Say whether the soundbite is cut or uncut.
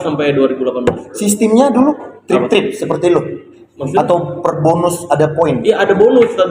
uncut